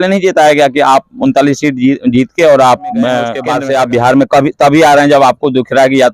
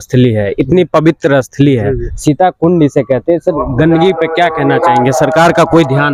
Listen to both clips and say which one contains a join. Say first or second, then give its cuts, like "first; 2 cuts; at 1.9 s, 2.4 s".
first; 1 cut; at 3.4 s